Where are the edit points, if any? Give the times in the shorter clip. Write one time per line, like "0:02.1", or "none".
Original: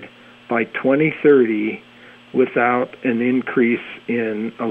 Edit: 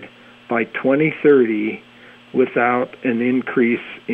none